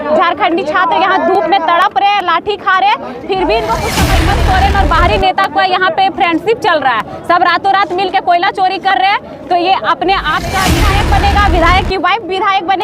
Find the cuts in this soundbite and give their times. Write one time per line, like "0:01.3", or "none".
0:04.1
0:10.8